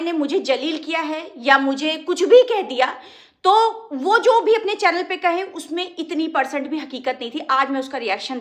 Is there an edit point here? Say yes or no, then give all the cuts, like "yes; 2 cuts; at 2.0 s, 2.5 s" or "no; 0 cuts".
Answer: no; 0 cuts